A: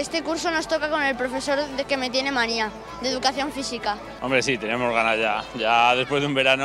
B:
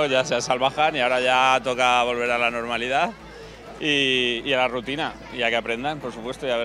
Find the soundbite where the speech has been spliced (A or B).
A